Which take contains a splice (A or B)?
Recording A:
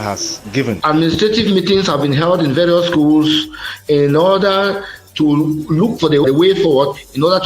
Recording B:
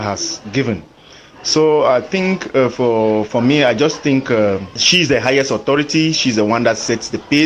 A